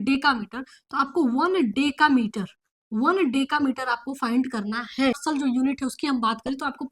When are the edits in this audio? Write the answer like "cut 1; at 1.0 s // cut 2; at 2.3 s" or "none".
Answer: cut 1; at 5.2 s